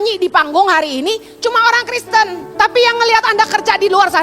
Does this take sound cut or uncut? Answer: cut